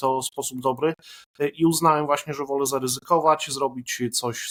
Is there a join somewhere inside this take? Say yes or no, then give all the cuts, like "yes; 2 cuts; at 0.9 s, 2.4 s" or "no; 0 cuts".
no; 0 cuts